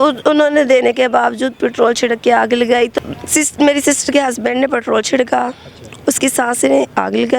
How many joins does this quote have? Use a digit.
1